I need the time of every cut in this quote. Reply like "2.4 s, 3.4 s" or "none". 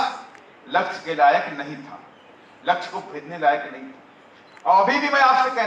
none